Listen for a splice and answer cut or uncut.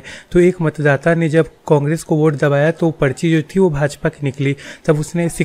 cut